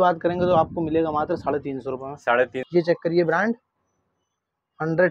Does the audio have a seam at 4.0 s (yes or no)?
no